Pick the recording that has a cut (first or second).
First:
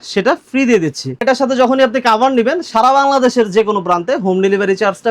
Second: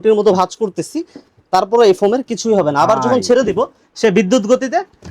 first